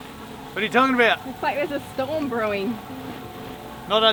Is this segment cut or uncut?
uncut